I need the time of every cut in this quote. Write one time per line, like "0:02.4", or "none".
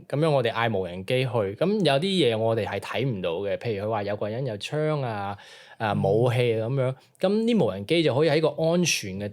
none